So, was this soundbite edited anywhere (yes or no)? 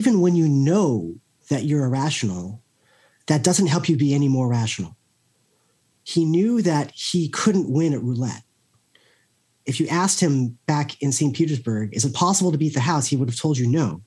no